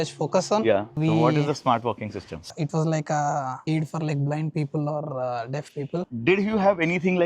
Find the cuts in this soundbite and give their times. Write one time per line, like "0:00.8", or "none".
0:00.9
0:02.4
0:06.1